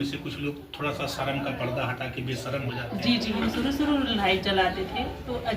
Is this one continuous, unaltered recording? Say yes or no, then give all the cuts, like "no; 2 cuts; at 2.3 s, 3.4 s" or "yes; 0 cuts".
no; 1 cut; at 3.4 s